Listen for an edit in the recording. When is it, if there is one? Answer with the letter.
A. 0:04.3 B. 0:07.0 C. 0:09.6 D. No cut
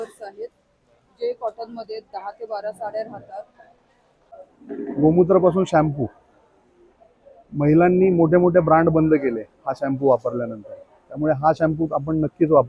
A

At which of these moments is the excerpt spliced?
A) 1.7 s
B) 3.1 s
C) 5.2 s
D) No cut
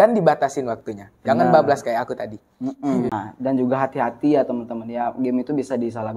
B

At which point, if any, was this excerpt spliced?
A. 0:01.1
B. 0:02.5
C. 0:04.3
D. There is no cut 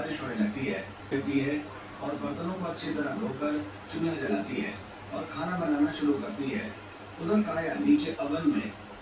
A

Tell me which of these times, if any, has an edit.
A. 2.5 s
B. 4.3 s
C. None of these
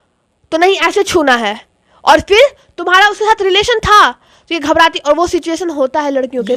C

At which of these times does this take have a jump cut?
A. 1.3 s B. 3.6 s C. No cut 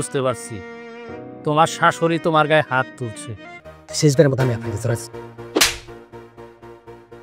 B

